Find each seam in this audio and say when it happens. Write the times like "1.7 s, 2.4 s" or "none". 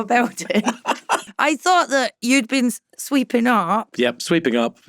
1.3 s